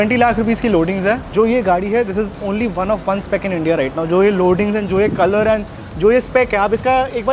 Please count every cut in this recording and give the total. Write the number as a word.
one